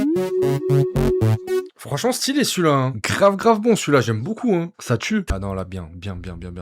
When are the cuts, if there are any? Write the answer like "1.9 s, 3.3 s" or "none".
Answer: 5.3 s